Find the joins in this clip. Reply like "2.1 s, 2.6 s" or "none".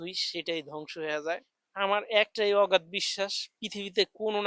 1.6 s